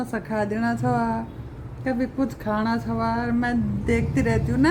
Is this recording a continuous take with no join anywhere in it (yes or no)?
yes